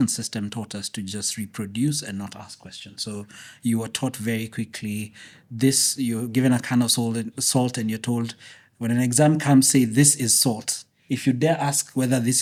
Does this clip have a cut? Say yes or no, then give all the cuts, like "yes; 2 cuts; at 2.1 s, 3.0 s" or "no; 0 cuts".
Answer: no; 0 cuts